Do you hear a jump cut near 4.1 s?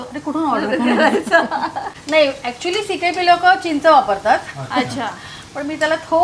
no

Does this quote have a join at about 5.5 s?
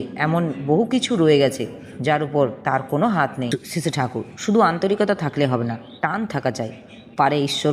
no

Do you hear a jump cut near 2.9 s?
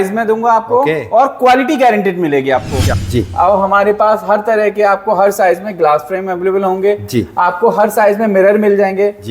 yes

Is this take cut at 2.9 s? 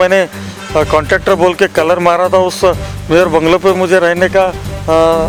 no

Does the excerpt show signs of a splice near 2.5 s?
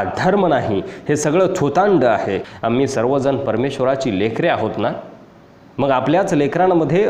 yes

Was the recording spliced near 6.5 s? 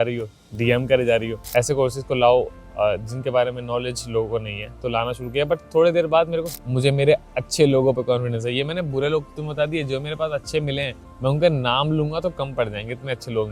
yes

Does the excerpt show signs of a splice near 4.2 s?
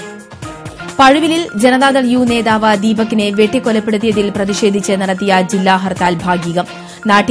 no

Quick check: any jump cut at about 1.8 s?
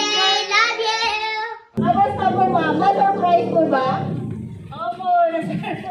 yes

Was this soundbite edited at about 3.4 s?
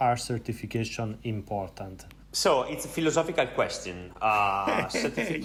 no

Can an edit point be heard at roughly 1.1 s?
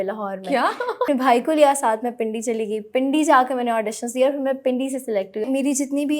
yes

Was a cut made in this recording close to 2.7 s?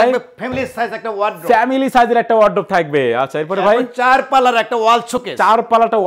no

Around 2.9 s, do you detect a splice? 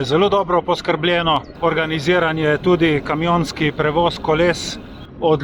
no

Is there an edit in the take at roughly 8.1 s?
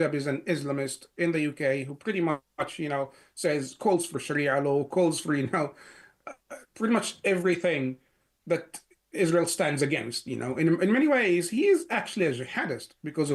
no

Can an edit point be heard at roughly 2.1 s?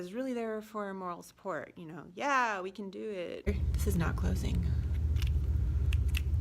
no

